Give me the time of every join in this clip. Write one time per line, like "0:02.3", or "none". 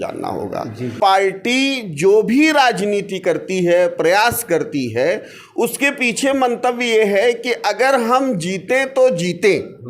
0:01.1